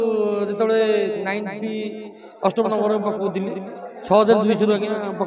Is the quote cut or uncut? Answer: uncut